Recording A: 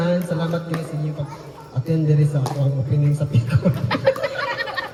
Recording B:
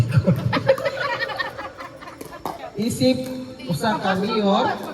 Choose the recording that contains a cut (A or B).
B